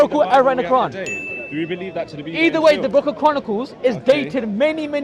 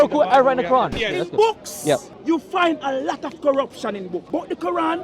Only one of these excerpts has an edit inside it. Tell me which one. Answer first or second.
second